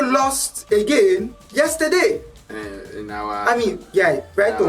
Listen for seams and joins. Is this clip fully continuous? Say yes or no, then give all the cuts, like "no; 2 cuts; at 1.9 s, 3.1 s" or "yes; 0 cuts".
no; 1 cut; at 1.4 s